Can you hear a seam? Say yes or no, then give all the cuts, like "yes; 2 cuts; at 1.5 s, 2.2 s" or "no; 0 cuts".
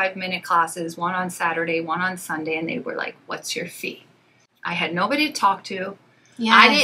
yes; 1 cut; at 4.4 s